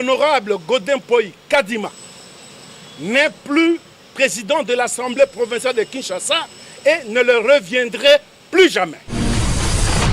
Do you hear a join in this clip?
yes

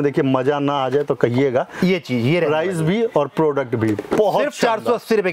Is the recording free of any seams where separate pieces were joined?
yes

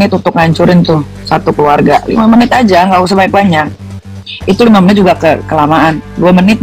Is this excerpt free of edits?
yes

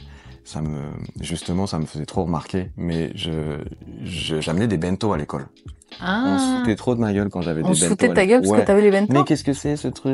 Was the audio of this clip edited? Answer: no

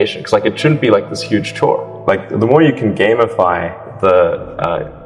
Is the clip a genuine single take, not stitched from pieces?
yes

